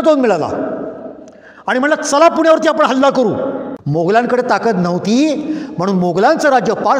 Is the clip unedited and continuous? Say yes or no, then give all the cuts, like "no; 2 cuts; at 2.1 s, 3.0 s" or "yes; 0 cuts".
no; 1 cut; at 3.7 s